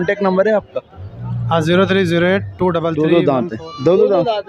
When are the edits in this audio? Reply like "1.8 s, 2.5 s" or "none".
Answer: 2.9 s